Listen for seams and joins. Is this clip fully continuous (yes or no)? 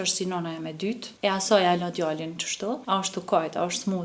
no